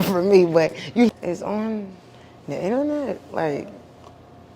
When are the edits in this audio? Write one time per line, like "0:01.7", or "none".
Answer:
0:01.1